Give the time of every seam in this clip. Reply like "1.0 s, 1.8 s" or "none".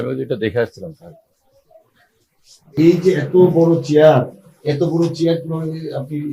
2.7 s